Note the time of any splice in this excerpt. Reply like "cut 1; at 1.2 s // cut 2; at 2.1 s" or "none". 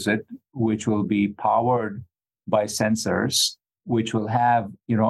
cut 1; at 3.8 s